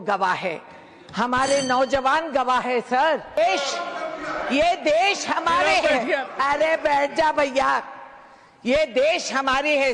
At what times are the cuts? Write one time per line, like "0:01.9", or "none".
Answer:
0:03.4